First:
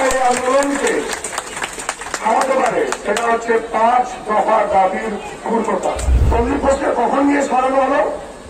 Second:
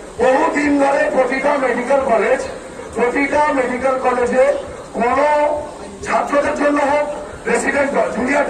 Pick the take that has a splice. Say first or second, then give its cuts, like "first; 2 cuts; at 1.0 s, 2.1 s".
first; 1 cut; at 6.1 s